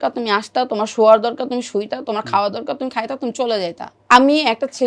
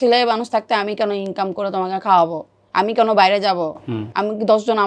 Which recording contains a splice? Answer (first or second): first